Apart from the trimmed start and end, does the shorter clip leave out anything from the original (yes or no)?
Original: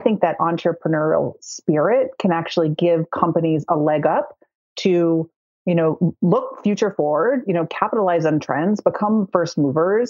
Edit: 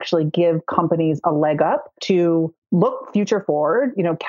yes